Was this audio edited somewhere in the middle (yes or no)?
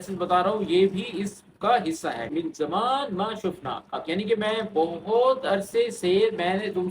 yes